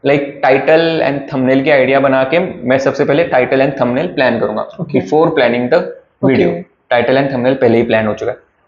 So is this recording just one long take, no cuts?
yes; 0 cuts

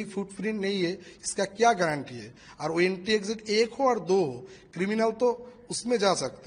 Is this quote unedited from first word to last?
yes; 0 cuts

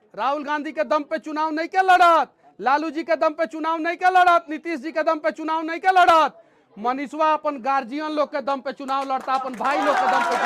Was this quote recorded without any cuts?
yes; 0 cuts

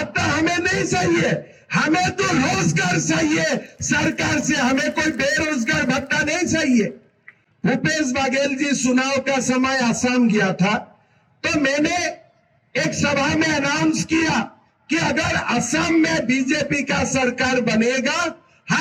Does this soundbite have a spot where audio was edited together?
no; 0 cuts

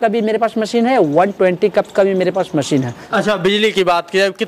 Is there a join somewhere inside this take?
yes; 1 cut; at 3.0 s

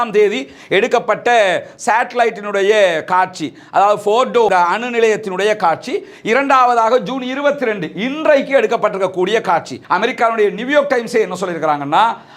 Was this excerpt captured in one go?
no; 1 cut; at 9.8 s

